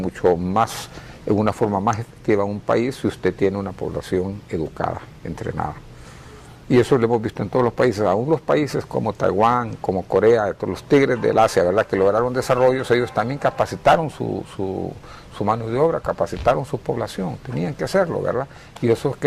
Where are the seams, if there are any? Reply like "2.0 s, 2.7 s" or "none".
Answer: none